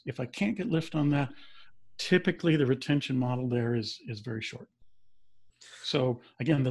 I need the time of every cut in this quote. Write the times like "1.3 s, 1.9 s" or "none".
none